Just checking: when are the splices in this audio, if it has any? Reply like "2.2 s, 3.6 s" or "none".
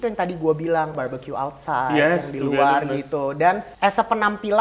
0.9 s, 3.7 s